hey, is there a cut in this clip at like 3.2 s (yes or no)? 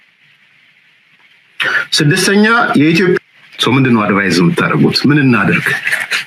yes